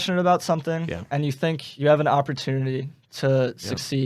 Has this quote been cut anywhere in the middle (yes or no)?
yes